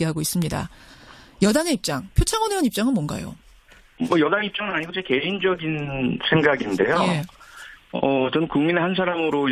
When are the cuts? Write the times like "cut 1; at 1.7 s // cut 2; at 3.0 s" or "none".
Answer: cut 1; at 2.5 s